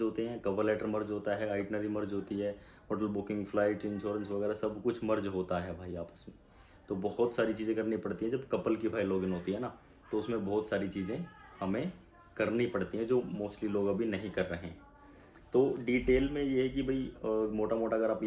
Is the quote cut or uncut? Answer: uncut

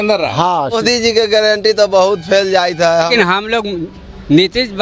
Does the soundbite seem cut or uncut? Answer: cut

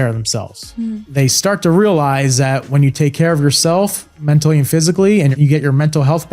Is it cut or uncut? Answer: cut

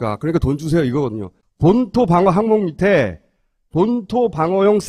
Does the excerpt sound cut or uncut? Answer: uncut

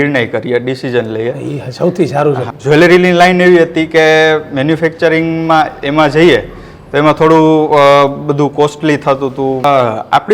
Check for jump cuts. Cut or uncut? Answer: cut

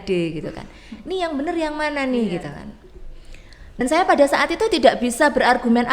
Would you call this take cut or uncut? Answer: cut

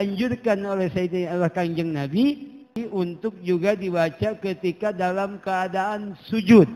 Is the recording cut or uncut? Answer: cut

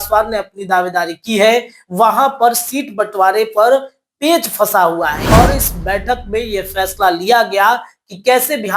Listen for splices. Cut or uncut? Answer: cut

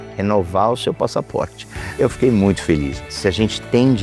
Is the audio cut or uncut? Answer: cut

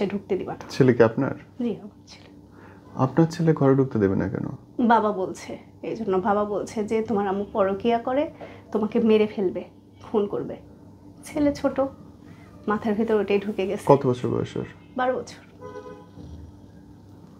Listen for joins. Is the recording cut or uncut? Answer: uncut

